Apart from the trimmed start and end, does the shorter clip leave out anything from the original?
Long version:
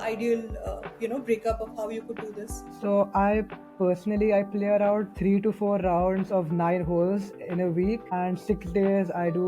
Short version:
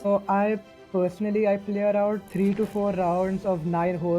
no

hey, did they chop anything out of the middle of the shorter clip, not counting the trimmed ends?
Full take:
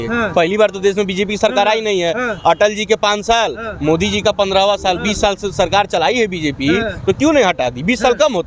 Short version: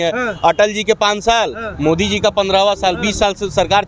no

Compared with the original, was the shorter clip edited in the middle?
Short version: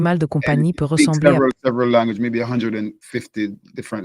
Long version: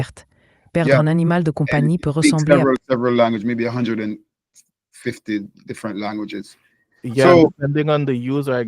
yes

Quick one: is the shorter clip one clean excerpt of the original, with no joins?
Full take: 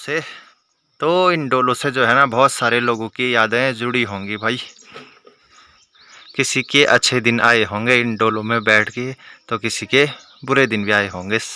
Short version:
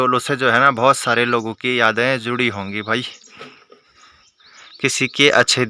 yes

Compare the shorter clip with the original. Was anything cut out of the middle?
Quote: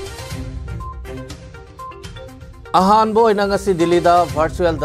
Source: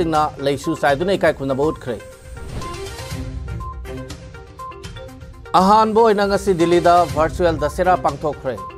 no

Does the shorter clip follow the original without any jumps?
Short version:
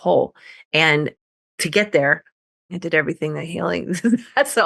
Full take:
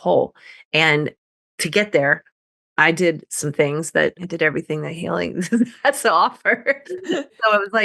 no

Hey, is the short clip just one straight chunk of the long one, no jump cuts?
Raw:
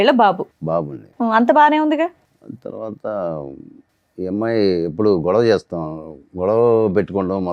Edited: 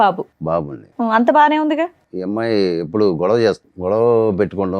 no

